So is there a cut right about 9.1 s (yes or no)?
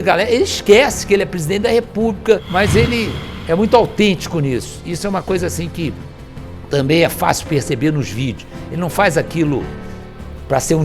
no